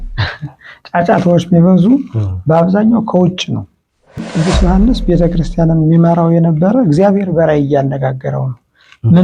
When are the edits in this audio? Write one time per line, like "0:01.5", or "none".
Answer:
0:04.3